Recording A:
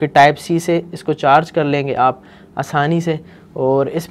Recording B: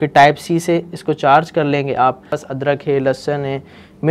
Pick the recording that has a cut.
B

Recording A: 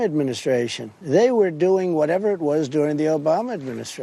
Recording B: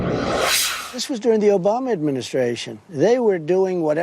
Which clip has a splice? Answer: B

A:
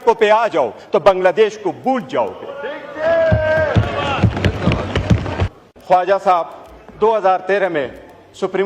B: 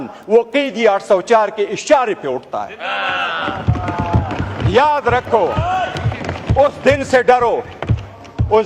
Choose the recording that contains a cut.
A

